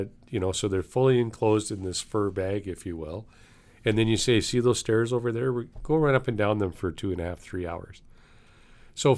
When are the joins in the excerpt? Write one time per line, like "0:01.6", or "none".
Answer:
none